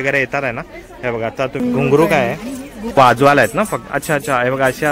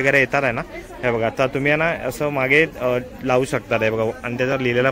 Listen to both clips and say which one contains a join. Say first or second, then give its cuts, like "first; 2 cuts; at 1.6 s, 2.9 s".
first; 2 cuts; at 1.6 s, 2.8 s